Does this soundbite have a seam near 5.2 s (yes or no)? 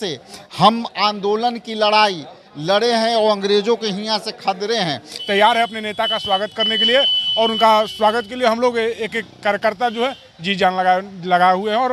yes